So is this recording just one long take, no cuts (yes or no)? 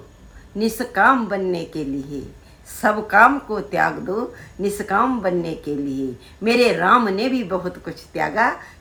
yes